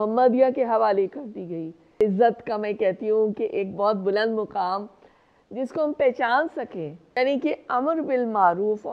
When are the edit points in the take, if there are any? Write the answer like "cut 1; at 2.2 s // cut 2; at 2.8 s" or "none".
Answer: cut 1; at 2.0 s // cut 2; at 7.2 s